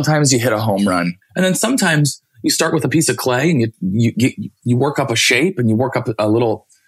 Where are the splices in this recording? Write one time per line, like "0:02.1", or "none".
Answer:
0:01.2